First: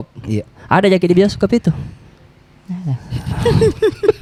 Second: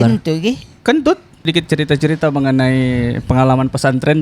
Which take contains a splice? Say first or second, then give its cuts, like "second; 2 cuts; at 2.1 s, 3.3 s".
second; 1 cut; at 1.4 s